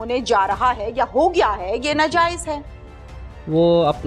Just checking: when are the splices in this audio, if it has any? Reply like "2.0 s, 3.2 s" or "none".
none

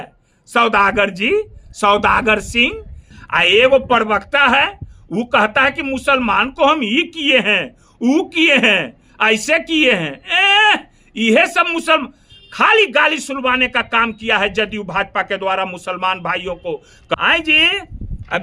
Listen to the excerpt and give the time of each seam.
3.1 s, 17.2 s

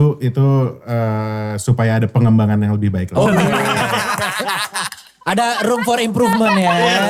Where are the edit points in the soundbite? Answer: none

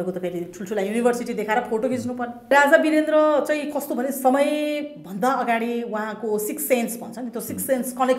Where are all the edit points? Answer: 2.5 s

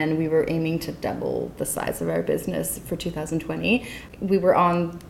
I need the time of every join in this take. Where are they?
4.0 s

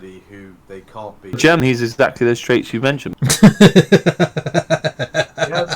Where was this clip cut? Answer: 1.6 s, 3.1 s

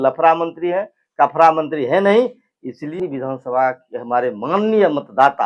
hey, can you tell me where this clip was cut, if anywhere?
2.8 s

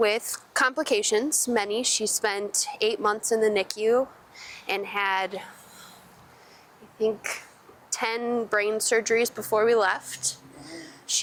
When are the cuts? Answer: none

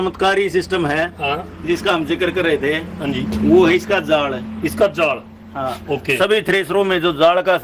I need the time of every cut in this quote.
none

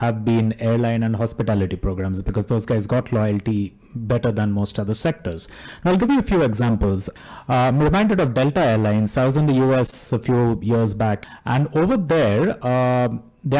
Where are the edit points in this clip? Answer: 7.1 s, 11.2 s

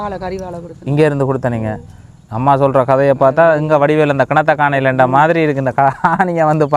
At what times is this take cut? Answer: none

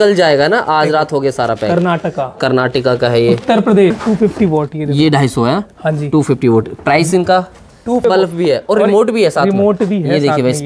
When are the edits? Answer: 4.0 s, 8.0 s

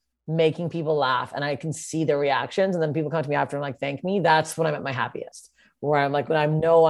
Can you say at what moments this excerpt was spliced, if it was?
none

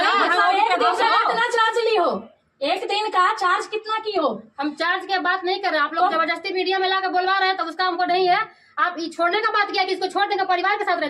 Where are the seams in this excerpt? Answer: none

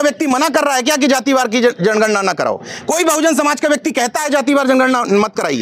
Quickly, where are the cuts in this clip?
none

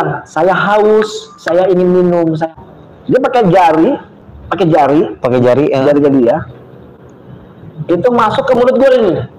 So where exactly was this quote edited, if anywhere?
2.5 s

